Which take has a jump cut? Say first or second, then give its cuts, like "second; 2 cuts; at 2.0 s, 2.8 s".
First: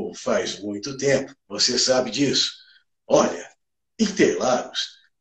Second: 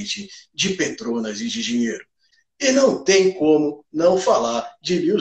second; 1 cut; at 2.3 s